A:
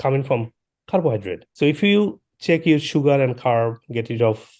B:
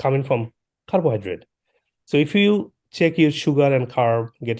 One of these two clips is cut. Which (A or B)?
A